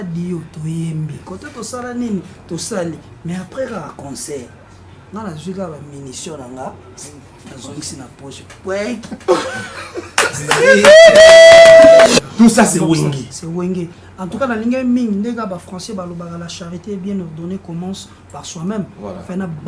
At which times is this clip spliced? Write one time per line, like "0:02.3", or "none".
0:12.1

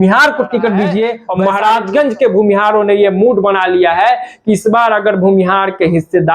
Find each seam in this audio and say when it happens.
0:01.3

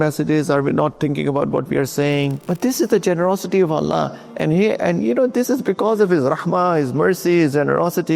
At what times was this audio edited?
0:02.4

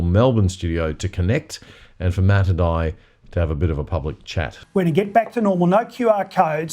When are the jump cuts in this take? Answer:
0:04.5

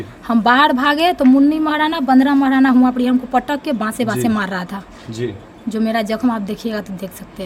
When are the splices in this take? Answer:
none

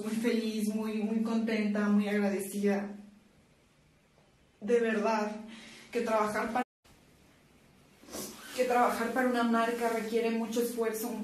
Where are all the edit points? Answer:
0:01.6

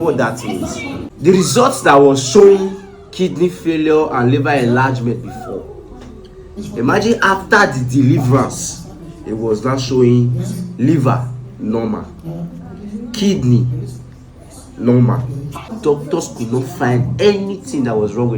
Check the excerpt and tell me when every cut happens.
0:01.0
0:15.7

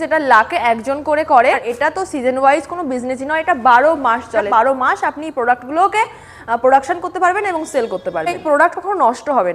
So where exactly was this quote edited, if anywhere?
0:01.7
0:04.5
0:08.4

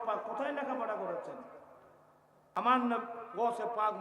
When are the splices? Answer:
0:02.6

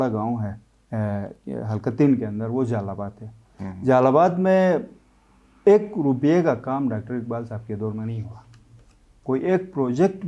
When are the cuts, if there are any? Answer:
none

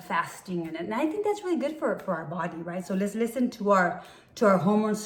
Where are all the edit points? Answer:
none

